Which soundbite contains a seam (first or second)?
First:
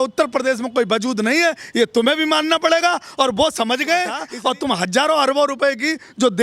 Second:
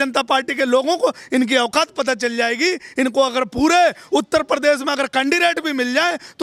first